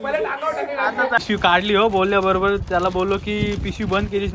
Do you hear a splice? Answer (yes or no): yes